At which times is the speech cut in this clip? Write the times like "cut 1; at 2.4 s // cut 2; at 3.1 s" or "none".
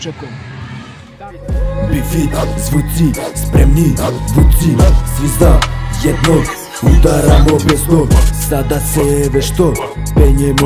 cut 1; at 1.0 s